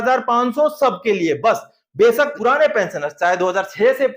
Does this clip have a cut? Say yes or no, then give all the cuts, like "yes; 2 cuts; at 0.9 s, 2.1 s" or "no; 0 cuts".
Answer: yes; 1 cut; at 2.3 s